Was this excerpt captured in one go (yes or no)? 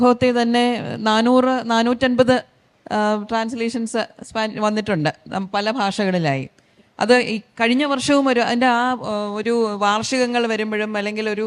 yes